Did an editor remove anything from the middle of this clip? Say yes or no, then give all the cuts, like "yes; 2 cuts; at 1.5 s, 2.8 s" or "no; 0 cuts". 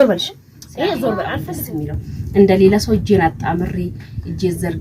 yes; 1 cut; at 1.5 s